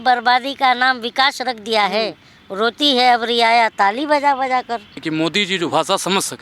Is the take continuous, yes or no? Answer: no